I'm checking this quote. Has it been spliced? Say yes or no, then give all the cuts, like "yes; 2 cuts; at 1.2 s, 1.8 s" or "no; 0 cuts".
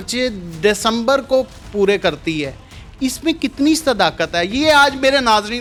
no; 0 cuts